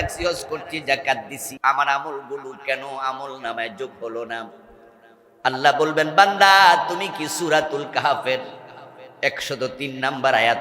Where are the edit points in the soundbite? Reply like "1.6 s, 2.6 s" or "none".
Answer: 1.4 s